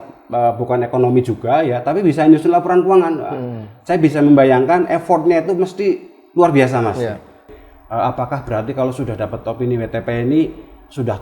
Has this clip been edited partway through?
yes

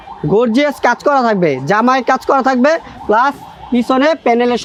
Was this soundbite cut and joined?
no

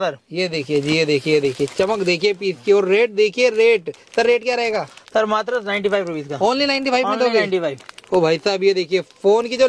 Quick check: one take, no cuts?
yes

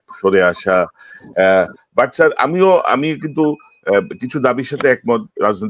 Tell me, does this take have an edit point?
no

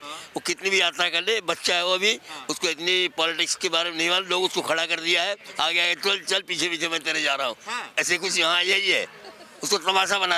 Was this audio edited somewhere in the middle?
no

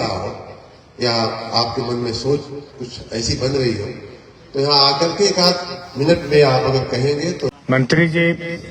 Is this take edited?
yes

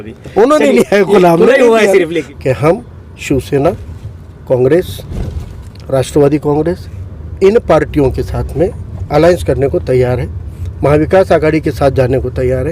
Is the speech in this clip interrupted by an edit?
yes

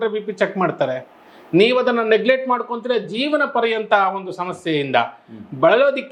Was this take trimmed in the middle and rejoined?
no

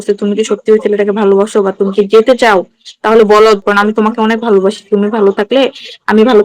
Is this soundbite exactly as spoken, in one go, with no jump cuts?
yes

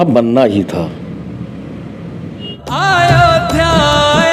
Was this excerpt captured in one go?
no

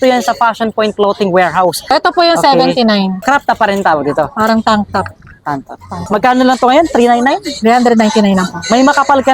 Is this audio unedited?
no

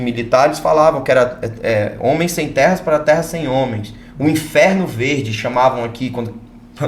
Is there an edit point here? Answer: no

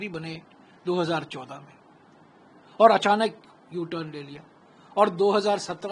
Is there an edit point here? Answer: no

